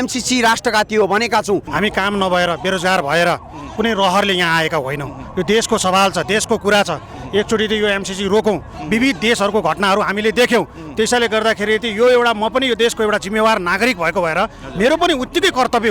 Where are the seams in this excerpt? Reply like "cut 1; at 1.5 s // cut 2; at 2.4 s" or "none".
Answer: cut 1; at 1.7 s